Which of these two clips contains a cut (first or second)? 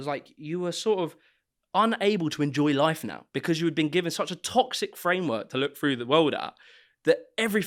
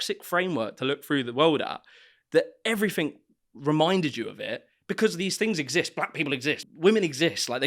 second